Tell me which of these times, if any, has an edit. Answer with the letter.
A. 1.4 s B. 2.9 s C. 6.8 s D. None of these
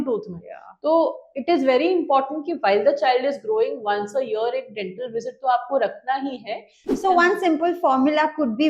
C